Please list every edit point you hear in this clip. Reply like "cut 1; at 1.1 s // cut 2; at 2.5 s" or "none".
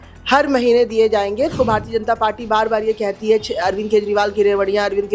cut 1; at 1.5 s